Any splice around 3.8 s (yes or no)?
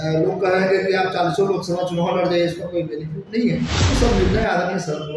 yes